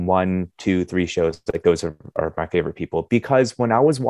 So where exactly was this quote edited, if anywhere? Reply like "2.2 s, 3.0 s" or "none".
none